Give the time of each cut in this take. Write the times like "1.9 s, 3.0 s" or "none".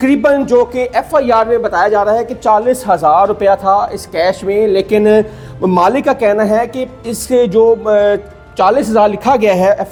none